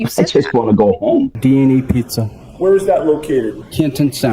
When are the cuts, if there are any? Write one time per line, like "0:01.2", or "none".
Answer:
0:01.3